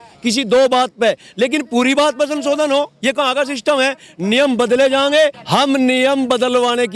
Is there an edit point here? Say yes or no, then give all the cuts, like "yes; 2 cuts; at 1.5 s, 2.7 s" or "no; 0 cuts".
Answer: yes; 1 cut; at 5.4 s